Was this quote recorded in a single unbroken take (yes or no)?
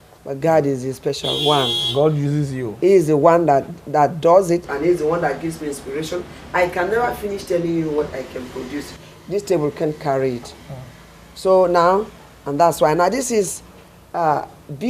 yes